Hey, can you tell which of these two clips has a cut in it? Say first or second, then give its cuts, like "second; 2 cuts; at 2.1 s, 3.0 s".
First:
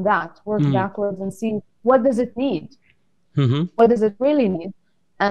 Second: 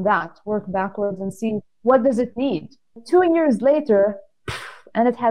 second; 1 cut; at 3.0 s